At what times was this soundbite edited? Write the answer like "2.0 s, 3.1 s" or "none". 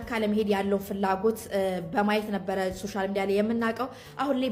none